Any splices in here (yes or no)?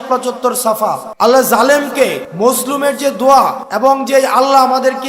yes